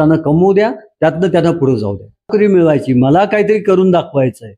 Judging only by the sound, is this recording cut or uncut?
cut